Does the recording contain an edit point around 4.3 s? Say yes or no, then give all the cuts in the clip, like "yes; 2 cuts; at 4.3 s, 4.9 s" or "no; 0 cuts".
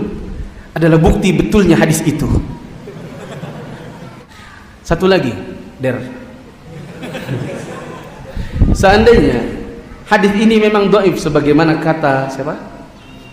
yes; 1 cut; at 4.3 s